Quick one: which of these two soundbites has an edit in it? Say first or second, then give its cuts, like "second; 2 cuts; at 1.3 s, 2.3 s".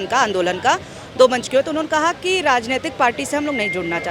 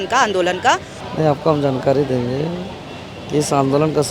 second; 1 cut; at 1.0 s